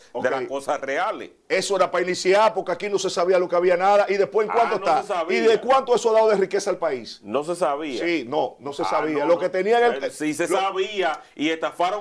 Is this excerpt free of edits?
yes; 0 cuts

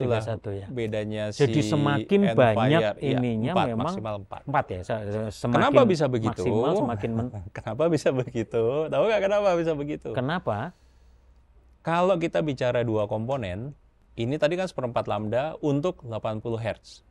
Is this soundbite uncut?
yes; 0 cuts

